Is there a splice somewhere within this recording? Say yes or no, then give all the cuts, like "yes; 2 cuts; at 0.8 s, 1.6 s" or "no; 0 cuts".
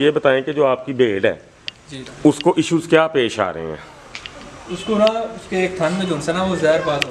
no; 0 cuts